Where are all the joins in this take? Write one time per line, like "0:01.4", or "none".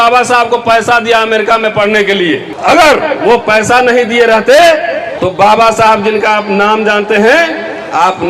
0:02.5
0:05.1